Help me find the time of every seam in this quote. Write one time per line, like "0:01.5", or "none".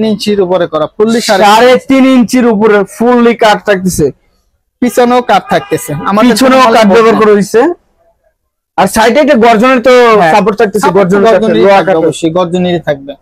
none